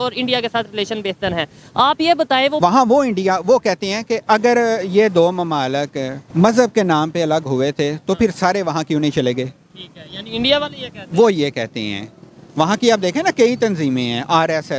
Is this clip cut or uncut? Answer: cut